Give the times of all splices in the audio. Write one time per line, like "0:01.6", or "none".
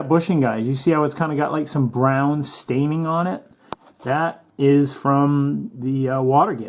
none